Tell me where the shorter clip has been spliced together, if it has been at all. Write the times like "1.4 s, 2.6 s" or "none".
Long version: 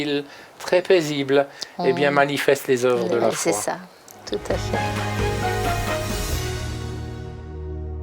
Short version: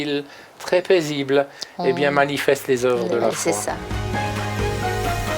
4.1 s